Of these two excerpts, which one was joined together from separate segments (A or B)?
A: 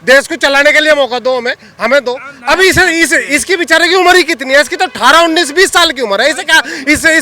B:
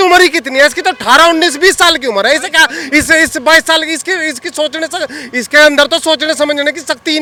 A